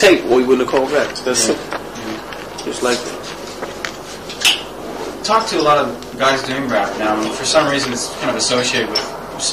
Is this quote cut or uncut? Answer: cut